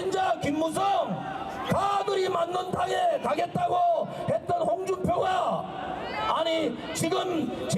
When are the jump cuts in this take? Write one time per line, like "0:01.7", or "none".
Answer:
0:05.7